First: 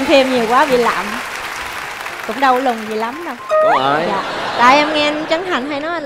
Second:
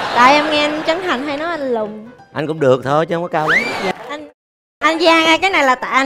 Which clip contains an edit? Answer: second; 1 cut; at 3.9 s

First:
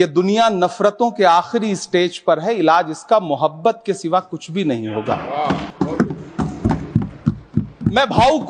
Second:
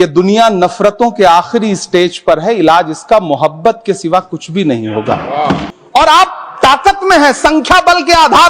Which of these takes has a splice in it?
second; 1 cut; at 5.7 s

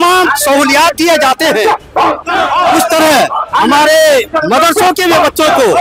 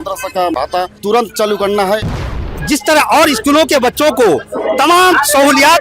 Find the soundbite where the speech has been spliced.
second; 2 cuts; at 0.9 s, 2.5 s

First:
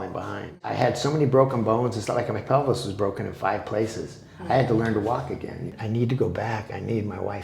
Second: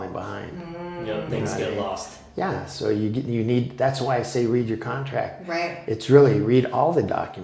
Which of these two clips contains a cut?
first; 2 cuts; at 0.7 s, 5.7 s

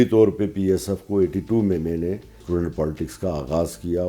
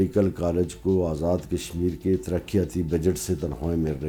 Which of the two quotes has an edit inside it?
first; 1 cut; at 2.4 s

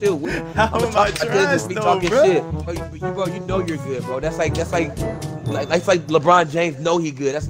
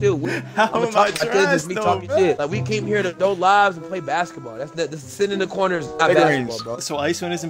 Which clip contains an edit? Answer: second; 1 cut; at 2.0 s

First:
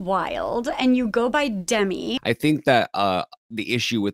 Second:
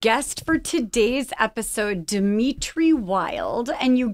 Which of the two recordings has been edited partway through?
first; 1 cut; at 2.2 s

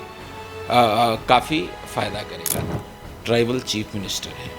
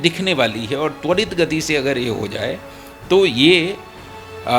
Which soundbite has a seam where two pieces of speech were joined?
first; 1 cut; at 2.7 s

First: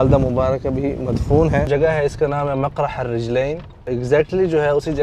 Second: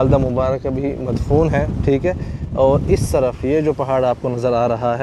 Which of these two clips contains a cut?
first; 2 cuts; at 1.7 s, 3.8 s

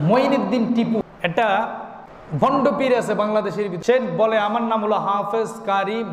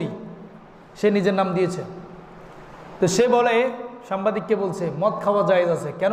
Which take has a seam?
first; 3 cuts; at 1.0 s, 2.2 s, 3.7 s

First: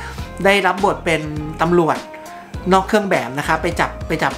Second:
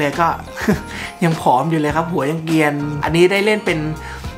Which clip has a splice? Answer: second; 1 cut; at 3.0 s

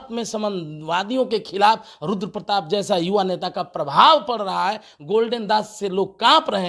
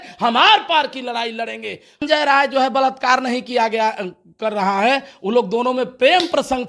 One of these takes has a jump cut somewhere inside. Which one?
second; 1 cut; at 2.0 s

